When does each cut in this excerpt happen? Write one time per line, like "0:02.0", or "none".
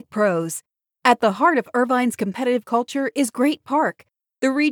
none